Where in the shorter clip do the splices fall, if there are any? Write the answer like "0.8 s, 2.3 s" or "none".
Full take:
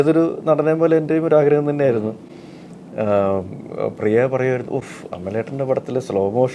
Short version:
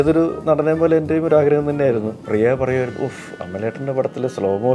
2.2 s